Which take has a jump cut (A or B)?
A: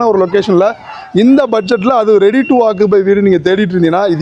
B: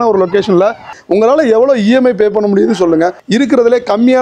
B